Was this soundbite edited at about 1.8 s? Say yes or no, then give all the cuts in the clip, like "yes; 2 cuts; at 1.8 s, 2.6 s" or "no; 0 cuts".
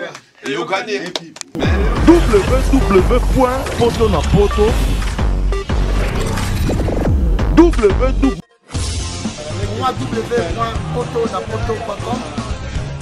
yes; 1 cut; at 1.8 s